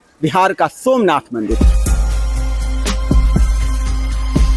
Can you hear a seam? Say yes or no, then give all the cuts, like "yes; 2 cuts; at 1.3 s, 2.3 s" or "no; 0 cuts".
no; 0 cuts